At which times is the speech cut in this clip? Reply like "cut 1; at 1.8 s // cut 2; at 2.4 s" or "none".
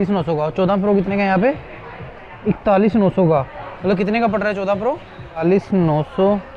none